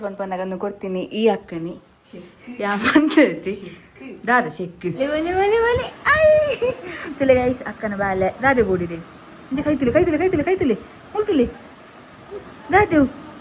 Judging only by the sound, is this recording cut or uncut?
cut